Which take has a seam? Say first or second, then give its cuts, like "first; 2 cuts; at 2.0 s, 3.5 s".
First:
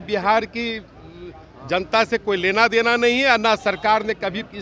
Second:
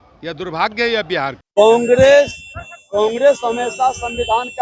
second; 1 cut; at 1.4 s